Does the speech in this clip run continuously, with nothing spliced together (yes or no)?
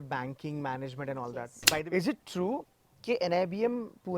no